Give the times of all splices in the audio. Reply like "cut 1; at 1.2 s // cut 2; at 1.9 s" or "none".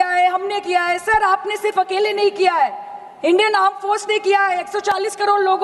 none